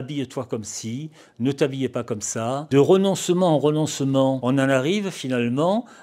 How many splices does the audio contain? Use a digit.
2